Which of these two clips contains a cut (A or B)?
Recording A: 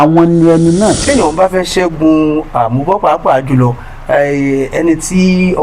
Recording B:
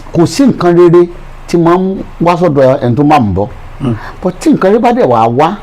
A